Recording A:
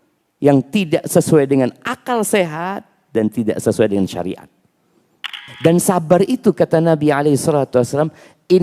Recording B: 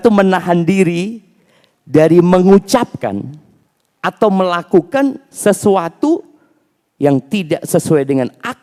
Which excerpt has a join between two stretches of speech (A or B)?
A